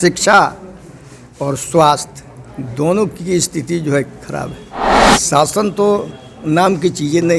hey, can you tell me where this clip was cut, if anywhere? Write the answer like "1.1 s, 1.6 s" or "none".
5.1 s